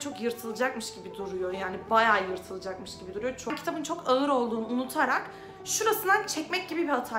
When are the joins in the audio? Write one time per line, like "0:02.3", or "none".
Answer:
0:03.5